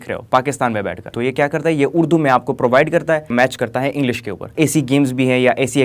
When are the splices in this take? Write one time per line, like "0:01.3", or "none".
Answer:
0:01.1
0:03.3
0:04.5